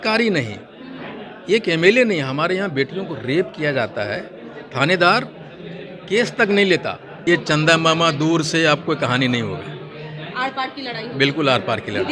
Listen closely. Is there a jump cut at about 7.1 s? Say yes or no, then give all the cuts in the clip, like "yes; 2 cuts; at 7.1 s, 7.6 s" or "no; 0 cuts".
yes; 1 cut; at 7.1 s